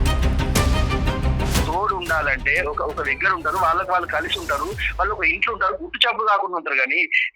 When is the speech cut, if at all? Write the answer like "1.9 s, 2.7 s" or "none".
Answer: 1.5 s